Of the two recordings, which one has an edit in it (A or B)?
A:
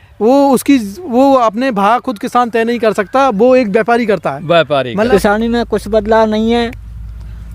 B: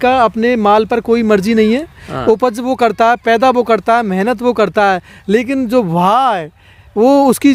A